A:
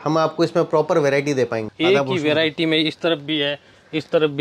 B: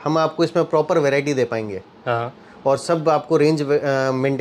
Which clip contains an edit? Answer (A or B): A